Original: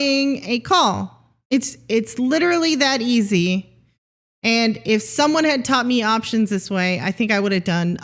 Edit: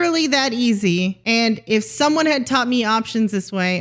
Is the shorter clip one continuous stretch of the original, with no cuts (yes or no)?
no